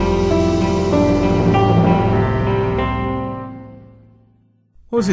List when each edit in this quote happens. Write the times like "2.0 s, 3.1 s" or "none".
none